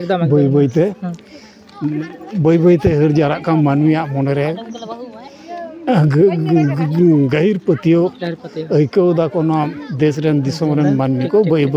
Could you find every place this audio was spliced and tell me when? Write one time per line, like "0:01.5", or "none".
none